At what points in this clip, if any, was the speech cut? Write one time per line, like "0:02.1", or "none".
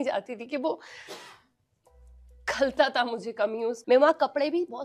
0:03.8